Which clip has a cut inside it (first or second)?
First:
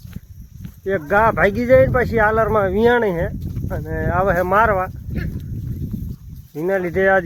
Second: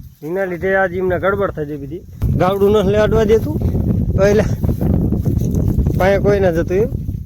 second